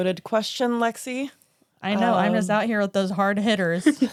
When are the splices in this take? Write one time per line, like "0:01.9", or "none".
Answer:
none